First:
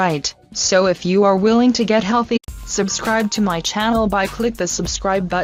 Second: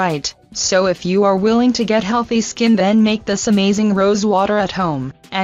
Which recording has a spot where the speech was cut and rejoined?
second; 1 cut; at 2.4 s

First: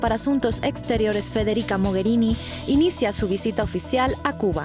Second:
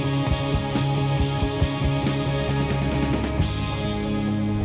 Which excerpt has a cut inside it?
second; 1 cut; at 1.6 s

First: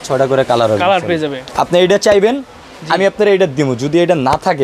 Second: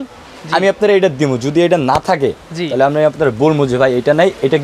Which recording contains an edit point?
first; 1 cut; at 1.4 s

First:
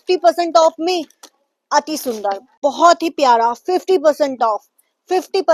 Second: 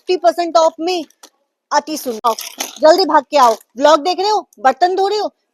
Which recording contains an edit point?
second; 1 cut; at 2.2 s

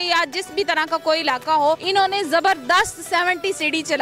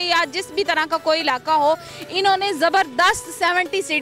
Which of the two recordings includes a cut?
first; 1 cut; at 1.8 s

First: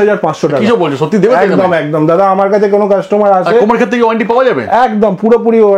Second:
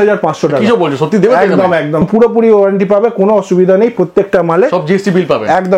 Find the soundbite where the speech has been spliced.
second; 1 cut; at 2.0 s

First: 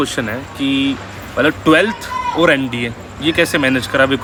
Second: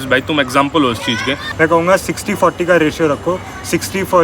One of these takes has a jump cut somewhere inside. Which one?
second; 1 cut; at 1.5 s

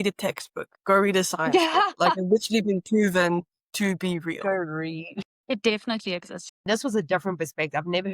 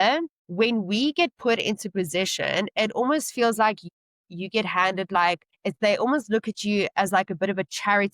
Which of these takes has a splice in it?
first; 1 cut; at 6.6 s

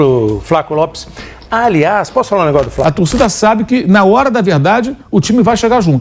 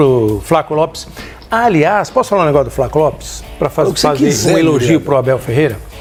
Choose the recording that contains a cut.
first; 1 cut; at 2.8 s

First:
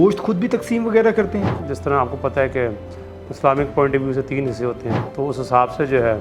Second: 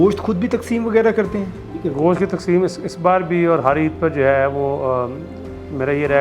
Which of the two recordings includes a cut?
first; 2 cuts; at 1.6 s, 5.0 s

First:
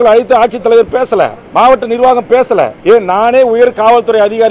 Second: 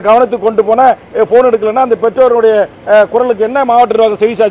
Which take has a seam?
first; 2 cuts; at 1.4 s, 2.8 s

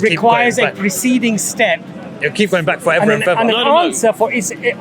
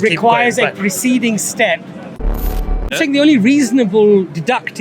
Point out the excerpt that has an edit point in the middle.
second; 1 cut; at 2.4 s

